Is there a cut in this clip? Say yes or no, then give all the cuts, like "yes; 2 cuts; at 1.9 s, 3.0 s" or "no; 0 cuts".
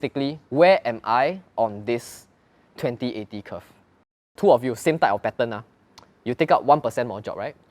yes; 1 cut; at 4.3 s